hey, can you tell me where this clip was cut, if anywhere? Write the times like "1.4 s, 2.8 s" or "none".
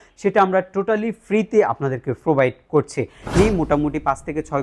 3.3 s